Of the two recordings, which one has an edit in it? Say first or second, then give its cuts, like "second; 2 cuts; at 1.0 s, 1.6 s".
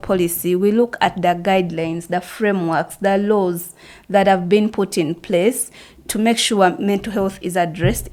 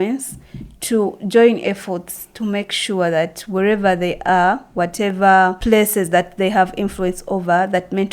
second; 1 cut; at 5.6 s